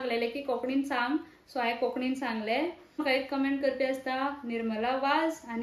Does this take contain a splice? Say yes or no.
yes